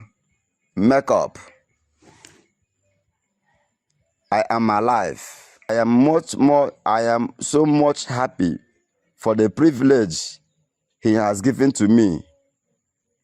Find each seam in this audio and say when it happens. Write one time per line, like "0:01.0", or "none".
0:05.7